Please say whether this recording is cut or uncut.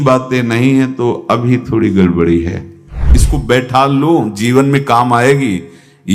cut